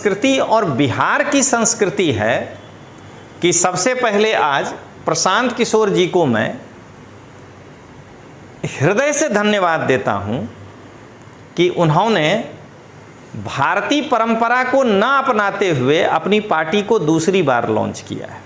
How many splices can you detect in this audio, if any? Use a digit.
0